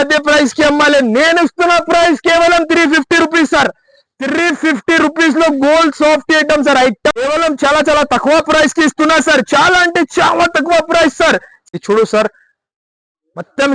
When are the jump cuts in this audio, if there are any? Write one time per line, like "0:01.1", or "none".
0:07.1
0:11.6